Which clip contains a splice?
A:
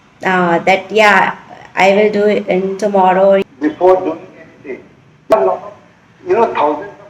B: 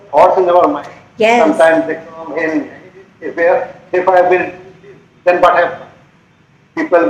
A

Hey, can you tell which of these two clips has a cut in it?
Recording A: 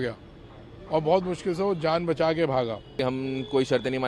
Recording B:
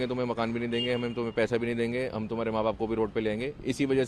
A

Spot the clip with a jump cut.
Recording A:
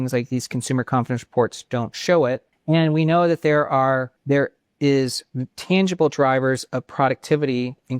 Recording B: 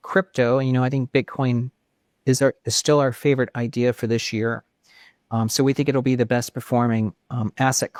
A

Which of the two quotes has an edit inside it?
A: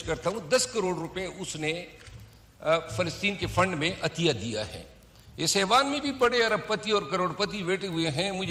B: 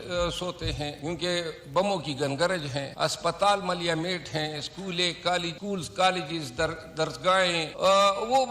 B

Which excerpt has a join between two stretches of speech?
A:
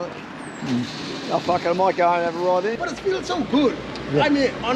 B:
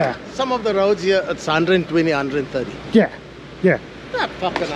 A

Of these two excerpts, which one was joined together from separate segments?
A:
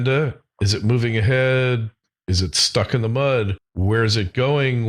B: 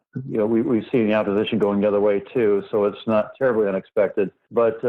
A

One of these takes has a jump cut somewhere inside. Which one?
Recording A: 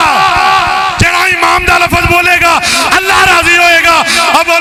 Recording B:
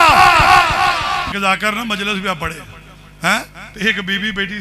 B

